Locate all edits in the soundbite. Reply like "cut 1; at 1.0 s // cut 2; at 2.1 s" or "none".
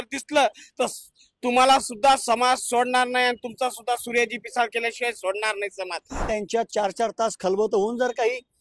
cut 1; at 6.2 s